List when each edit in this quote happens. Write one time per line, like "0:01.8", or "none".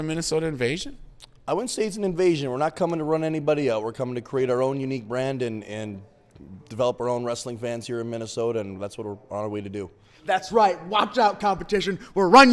none